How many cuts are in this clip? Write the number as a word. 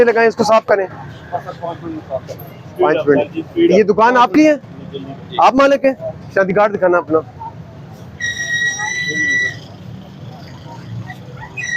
zero